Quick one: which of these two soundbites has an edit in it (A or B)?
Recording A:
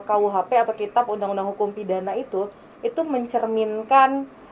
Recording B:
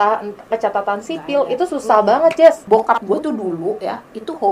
B